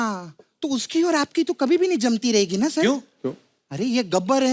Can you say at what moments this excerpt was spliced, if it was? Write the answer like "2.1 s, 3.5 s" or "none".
none

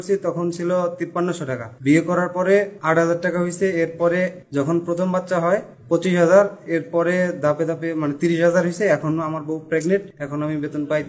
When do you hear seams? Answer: 1.3 s, 2.8 s, 4.4 s, 5.7 s, 9.8 s

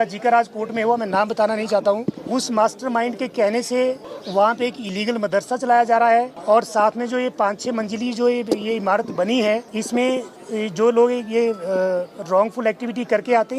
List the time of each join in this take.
2.2 s, 4.1 s, 6.4 s, 9.7 s, 10.4 s

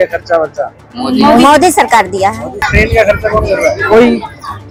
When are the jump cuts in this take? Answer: none

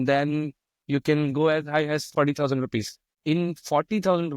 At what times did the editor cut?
3.1 s

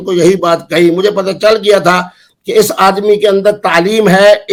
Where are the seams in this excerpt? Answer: none

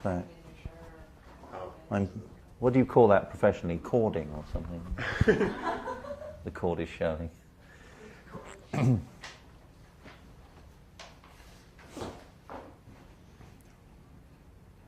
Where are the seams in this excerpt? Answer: 3.2 s

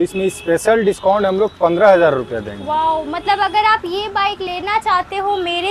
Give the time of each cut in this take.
none

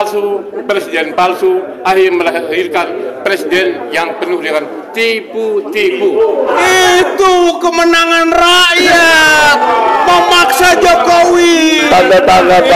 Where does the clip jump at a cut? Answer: 6.5 s

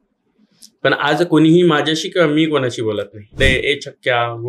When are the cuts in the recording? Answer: 3.4 s

